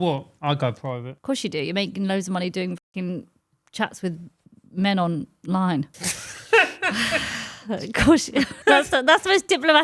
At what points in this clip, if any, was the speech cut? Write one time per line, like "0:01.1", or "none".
0:01.1
0:08.5